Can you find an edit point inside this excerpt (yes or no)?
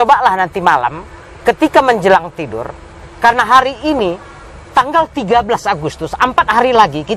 no